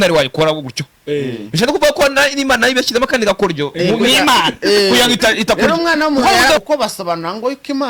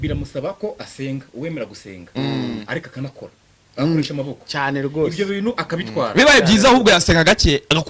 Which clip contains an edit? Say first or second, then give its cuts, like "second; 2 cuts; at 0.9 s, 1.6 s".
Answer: first; 1 cut; at 6.6 s